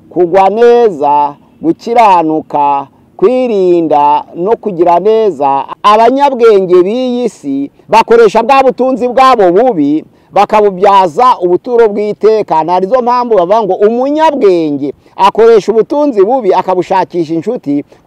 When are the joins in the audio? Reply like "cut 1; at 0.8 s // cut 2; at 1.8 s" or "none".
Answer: cut 1; at 5.7 s

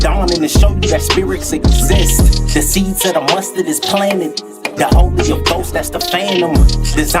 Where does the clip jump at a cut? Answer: cut 1; at 4.0 s

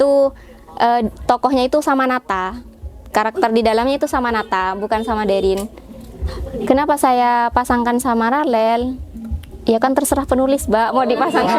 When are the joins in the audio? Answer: none

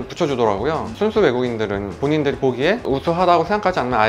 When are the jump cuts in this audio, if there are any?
none

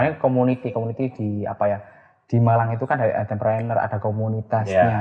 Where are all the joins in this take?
none

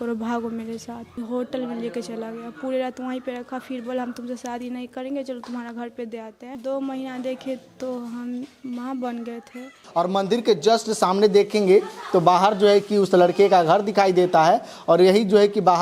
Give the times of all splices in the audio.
cut 1; at 1.2 s // cut 2; at 6.6 s // cut 3; at 9.8 s

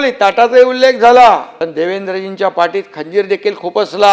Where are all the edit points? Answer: cut 1; at 1.6 s

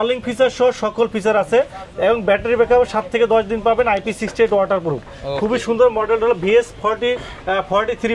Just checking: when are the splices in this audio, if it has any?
none

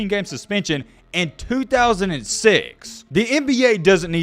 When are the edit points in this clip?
cut 1; at 2.9 s

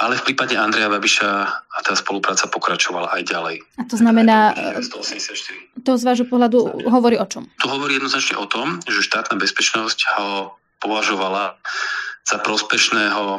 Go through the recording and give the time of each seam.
none

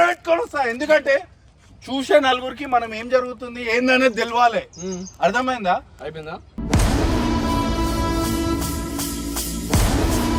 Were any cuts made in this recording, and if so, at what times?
none

